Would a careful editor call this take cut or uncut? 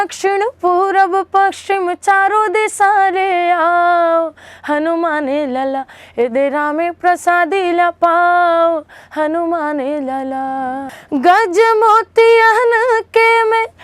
cut